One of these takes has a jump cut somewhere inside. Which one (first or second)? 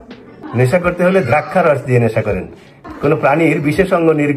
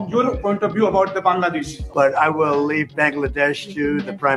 second